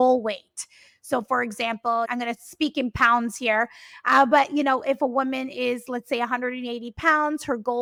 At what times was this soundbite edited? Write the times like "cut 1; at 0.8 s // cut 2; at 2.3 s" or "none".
none